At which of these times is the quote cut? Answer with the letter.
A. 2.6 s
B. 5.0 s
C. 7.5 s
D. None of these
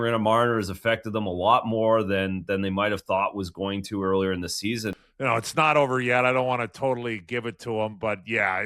B